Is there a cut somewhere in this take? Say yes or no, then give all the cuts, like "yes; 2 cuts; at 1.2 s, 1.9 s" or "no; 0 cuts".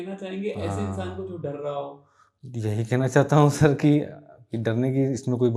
no; 0 cuts